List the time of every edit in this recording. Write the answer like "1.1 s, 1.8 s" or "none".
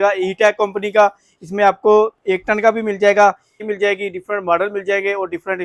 3.6 s